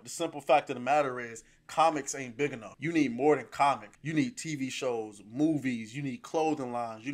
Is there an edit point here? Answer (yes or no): yes